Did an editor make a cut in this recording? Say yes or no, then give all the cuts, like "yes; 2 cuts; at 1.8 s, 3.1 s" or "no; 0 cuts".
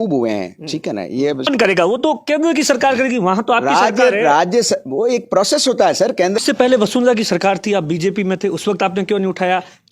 yes; 2 cuts; at 1.5 s, 6.4 s